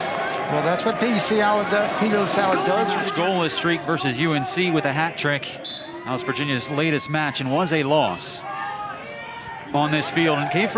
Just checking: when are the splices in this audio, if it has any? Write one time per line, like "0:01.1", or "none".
0:03.0

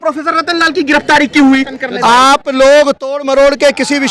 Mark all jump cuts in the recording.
0:01.7

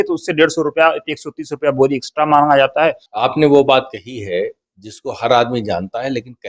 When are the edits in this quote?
0:03.1

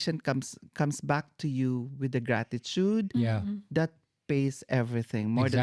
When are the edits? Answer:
none

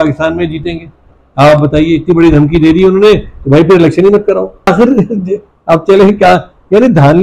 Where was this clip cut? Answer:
0:04.7

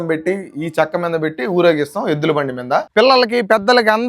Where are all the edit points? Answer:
0:02.9

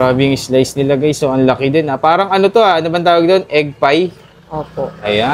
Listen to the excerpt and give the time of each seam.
none

